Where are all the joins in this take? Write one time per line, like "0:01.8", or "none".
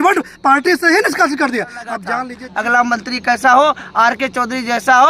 0:02.2